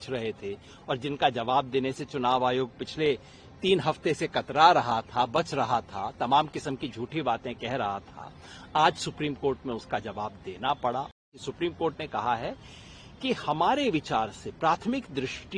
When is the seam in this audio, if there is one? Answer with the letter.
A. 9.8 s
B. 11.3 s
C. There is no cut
B